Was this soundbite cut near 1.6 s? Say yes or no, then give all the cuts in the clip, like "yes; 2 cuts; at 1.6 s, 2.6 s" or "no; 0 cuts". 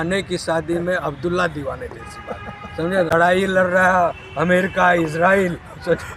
no; 1 cut; at 3.1 s